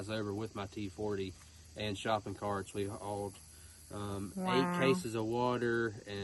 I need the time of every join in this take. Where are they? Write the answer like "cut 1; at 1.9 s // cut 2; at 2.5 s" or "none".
none